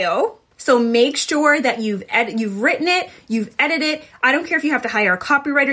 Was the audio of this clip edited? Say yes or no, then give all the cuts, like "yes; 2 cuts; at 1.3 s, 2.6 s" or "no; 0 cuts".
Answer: no; 0 cuts